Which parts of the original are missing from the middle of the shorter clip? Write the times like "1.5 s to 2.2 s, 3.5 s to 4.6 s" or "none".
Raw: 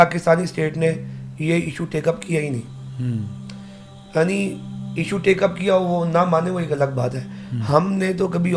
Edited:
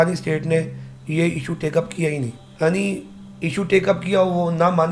2.7 s to 4.0 s